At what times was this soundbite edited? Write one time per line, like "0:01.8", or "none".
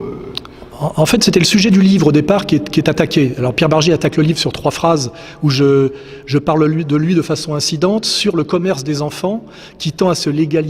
0:02.8